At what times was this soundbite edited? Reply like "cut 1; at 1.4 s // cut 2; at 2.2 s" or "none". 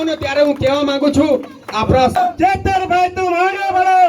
cut 1; at 2.2 s